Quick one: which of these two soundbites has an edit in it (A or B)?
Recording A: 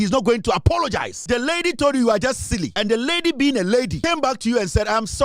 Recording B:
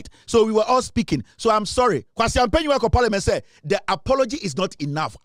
A